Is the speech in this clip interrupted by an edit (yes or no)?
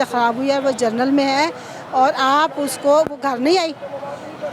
no